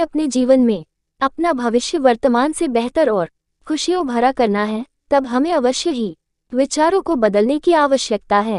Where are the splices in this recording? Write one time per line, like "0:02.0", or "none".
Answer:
none